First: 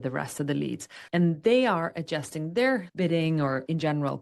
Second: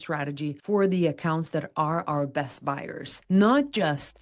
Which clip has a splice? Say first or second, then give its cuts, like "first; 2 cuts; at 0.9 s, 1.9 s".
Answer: first; 1 cut; at 2.9 s